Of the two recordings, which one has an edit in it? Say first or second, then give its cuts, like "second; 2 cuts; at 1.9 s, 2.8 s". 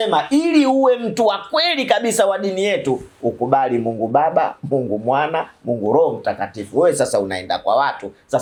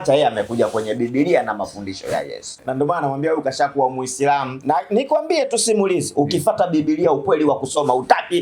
second; 2 cuts; at 2.5 s, 4.5 s